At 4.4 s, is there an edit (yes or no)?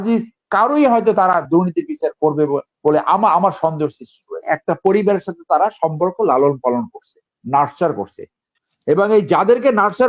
yes